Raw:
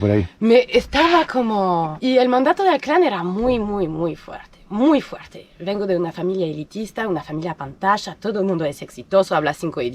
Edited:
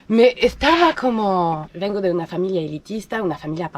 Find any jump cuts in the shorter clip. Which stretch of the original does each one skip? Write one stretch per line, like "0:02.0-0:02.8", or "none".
0:01.9-0:05.5